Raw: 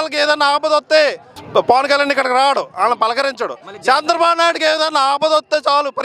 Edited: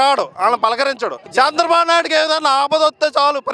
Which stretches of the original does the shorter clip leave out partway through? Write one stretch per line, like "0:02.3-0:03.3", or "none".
0:03.6-0:03.7